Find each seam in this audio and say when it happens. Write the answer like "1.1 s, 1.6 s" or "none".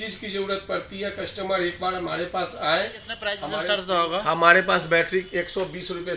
3.5 s